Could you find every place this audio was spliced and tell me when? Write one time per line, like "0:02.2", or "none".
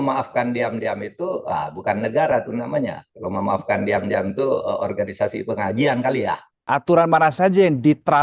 0:06.6